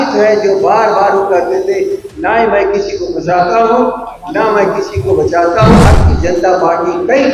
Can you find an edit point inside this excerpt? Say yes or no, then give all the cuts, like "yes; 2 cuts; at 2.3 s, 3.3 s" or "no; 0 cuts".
yes; 1 cut; at 5.9 s